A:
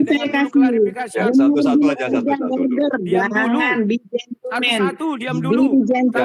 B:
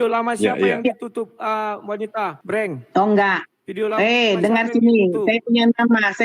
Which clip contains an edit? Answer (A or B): B